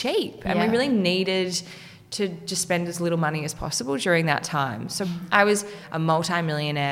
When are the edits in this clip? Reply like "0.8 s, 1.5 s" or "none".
5.0 s, 5.8 s